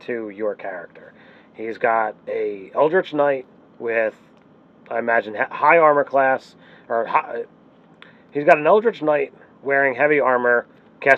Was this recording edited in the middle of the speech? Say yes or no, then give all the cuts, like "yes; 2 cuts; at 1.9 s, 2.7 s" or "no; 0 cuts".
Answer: yes; 1 cut; at 2.6 s